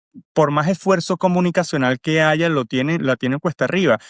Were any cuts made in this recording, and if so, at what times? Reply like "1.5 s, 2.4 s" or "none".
none